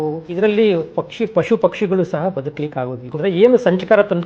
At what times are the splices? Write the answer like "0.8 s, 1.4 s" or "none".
3.0 s